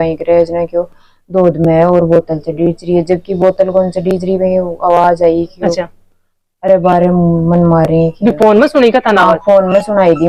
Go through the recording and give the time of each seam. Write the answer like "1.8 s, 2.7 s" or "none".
none